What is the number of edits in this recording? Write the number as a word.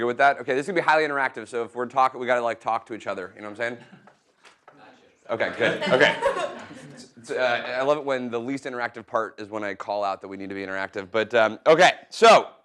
zero